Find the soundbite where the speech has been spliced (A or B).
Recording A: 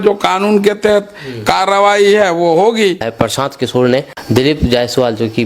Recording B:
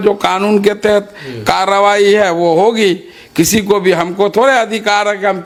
A